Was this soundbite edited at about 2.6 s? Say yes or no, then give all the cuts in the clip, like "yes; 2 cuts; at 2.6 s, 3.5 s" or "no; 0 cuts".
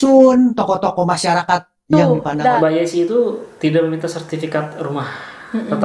yes; 1 cut; at 2.6 s